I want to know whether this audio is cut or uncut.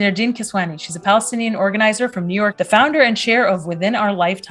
cut